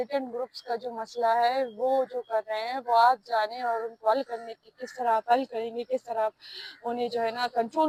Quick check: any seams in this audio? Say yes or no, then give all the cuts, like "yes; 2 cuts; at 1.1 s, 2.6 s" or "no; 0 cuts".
no; 0 cuts